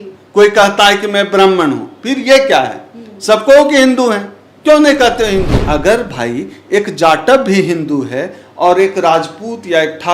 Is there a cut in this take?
yes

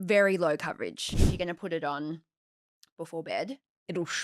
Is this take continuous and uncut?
no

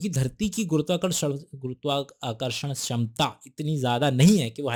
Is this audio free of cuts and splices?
yes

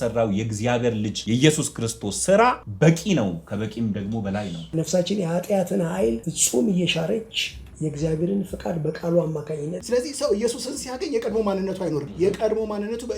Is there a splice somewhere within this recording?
yes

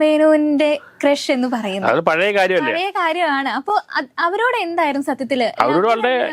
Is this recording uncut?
yes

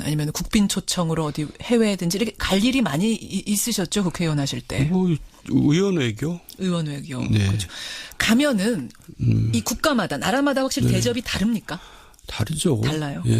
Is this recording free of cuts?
no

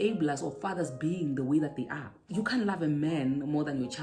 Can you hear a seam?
yes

